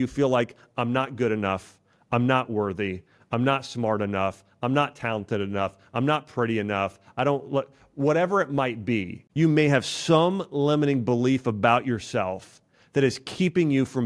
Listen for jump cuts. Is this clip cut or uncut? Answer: uncut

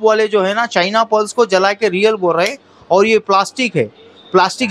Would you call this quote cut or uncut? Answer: uncut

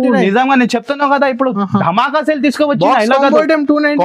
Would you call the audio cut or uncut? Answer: uncut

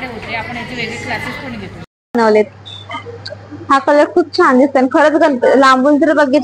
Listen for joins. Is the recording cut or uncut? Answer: cut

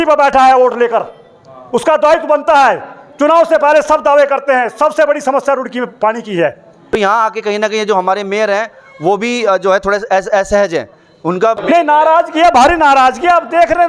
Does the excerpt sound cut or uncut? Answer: cut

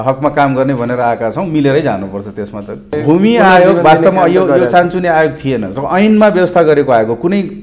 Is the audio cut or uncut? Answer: cut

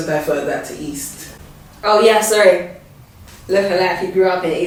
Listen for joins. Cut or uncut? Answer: uncut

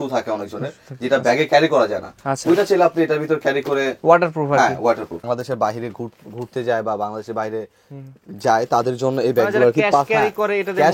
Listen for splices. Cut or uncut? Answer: cut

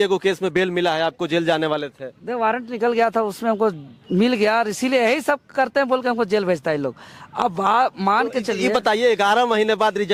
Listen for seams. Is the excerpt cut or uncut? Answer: uncut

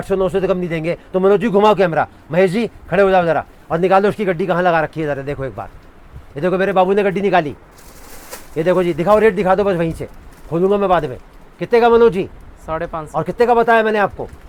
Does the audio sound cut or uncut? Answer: uncut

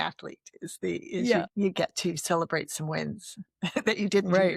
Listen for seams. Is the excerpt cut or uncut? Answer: cut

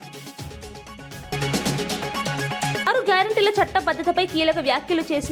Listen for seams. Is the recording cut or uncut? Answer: uncut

